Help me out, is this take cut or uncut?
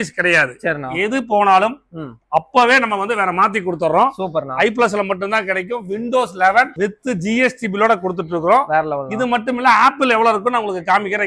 uncut